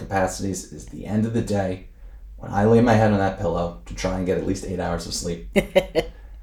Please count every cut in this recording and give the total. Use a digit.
1